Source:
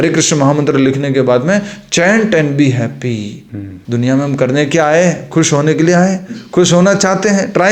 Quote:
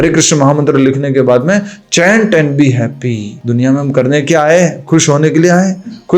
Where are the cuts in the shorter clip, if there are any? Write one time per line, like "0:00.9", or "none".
0:03.3